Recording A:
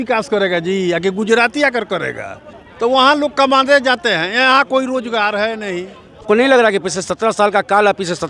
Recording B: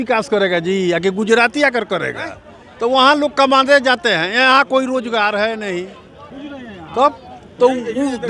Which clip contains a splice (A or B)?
A